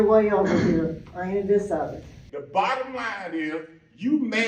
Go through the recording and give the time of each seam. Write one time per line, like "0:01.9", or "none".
0:02.1